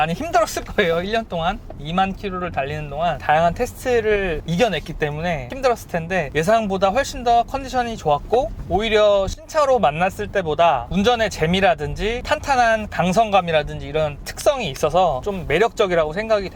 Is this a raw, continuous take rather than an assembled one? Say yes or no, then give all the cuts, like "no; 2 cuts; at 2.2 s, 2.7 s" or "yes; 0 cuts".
no; 4 cuts; at 5.5 s, 6.3 s, 12.2 s, 15.3 s